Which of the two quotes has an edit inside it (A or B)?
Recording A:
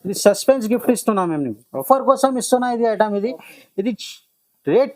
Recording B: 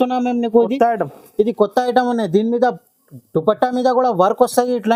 A